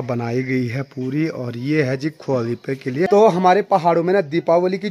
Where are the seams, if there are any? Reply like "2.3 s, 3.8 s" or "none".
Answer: 3.1 s